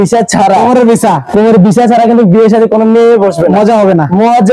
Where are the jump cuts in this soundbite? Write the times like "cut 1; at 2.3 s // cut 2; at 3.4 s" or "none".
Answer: none